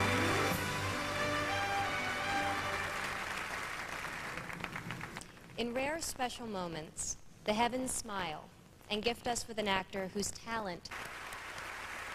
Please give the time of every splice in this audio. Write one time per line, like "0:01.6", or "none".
none